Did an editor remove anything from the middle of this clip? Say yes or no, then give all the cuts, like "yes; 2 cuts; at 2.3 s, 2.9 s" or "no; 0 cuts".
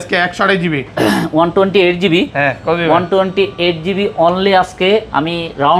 no; 0 cuts